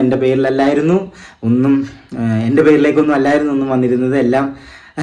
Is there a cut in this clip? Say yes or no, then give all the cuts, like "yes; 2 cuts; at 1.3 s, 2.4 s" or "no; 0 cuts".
no; 0 cuts